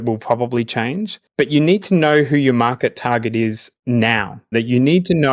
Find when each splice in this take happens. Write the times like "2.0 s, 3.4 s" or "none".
1.2 s, 3.9 s